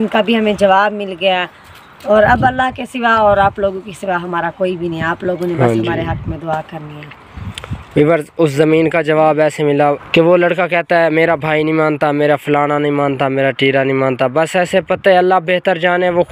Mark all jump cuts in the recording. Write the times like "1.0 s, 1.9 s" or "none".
10.0 s